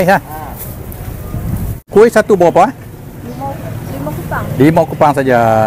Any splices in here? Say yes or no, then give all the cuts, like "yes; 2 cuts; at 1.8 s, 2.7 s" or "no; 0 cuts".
yes; 1 cut; at 1.9 s